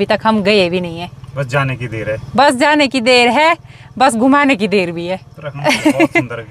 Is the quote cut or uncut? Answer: uncut